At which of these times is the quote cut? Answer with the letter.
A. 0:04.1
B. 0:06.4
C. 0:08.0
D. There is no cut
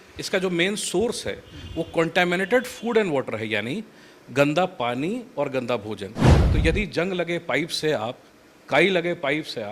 B